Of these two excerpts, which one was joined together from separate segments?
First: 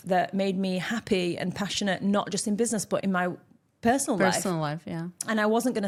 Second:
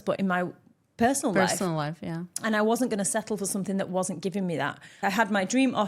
second; 1 cut; at 4.9 s

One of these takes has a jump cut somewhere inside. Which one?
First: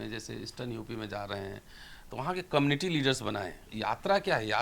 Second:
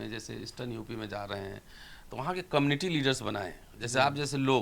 first; 1 cut; at 3.7 s

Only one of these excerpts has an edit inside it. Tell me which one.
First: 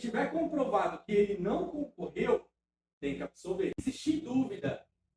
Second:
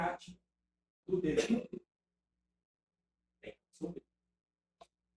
first; 1 cut; at 3.8 s

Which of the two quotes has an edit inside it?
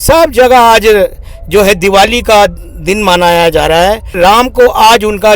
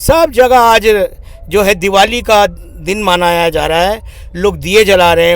first; 1 cut; at 4.1 s

